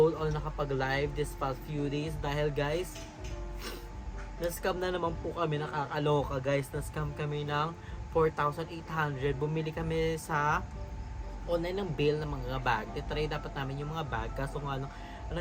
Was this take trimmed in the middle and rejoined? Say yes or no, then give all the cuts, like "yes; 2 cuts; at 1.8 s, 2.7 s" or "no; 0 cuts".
no; 0 cuts